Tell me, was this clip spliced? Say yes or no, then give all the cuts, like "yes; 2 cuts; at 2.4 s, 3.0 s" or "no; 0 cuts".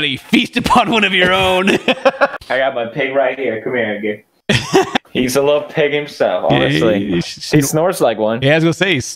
yes; 2 cuts; at 2.3 s, 5.0 s